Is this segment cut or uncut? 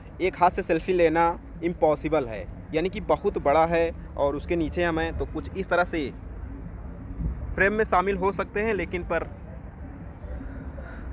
uncut